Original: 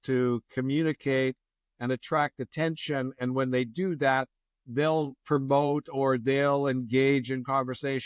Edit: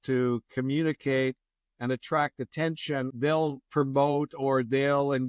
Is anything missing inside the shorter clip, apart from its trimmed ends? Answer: yes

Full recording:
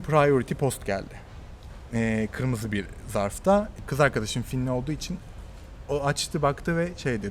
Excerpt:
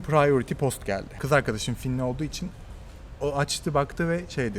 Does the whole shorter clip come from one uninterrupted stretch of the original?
no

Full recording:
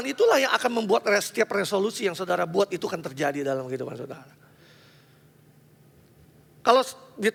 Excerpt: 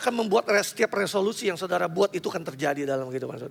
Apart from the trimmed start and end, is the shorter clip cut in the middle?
no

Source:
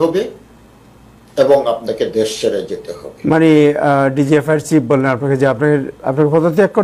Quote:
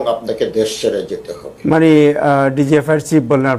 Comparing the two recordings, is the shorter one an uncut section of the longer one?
yes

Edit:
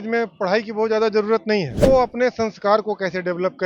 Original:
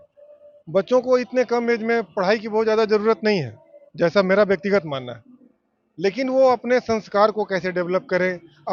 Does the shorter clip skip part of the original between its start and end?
yes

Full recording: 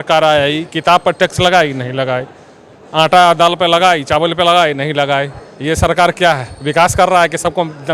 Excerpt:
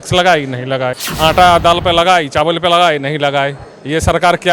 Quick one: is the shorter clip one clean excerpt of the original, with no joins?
no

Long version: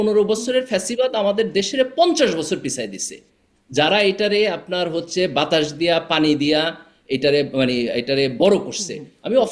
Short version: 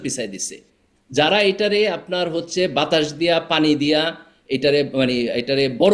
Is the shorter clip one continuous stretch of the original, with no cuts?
yes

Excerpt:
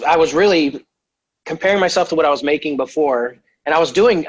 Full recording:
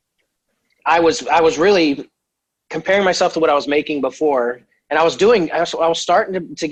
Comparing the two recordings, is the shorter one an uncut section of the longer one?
yes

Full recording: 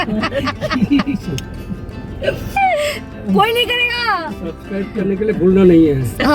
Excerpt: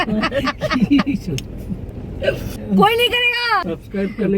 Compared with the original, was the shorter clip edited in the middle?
yes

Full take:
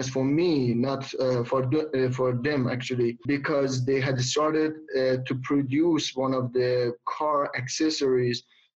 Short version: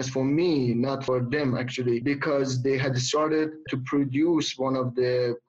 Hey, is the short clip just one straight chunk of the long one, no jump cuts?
no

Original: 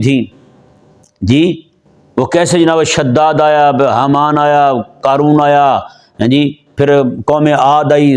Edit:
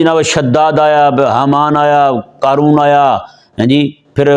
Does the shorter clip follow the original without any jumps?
yes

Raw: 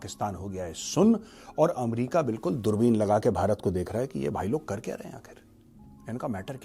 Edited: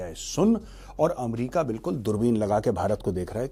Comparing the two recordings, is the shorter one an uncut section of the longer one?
yes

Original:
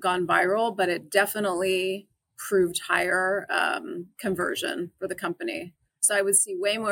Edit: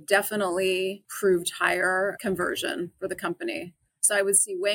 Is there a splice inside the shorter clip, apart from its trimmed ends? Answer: yes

